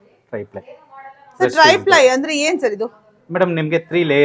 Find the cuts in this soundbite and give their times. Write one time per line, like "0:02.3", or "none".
none